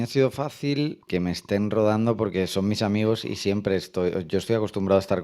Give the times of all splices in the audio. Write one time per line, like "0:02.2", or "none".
0:01.0